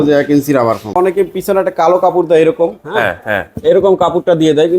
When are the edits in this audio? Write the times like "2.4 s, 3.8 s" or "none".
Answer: 0.9 s